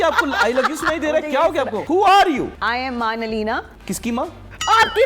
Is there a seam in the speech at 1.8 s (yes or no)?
yes